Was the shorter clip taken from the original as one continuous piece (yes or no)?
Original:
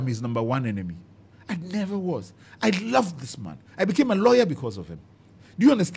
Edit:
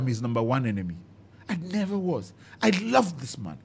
yes